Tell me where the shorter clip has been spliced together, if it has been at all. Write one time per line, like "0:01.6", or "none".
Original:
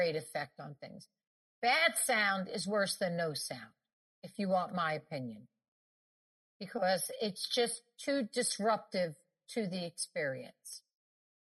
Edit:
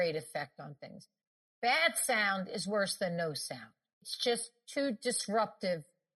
0:04.1